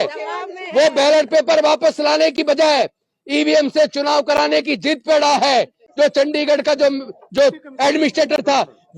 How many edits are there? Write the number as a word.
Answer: one